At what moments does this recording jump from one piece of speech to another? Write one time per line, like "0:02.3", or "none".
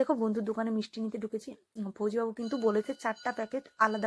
none

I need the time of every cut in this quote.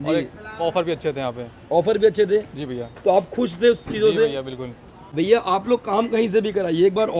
none

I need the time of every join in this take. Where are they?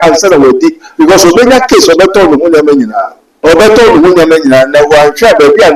0:03.3

